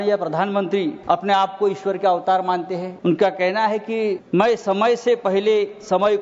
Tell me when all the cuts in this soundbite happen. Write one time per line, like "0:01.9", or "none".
0:01.0
0:02.9
0:04.2

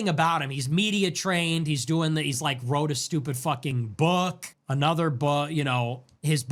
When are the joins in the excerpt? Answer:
none

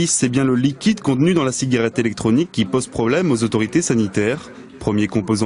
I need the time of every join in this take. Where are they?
none

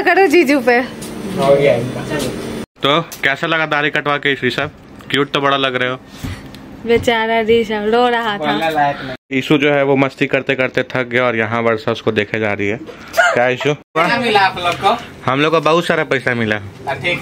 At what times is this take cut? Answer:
0:02.7
0:09.2
0:13.8

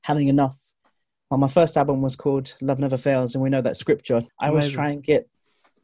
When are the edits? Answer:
0:04.3

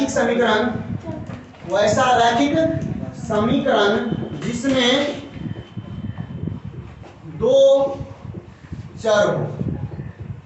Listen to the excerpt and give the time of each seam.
none

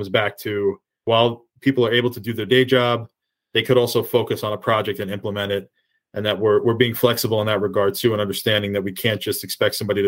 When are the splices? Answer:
0:01.2

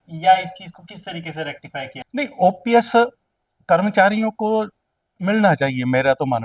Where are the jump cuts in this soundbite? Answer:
0:02.0

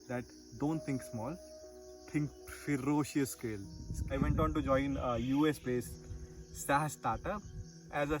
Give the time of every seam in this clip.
0:03.9

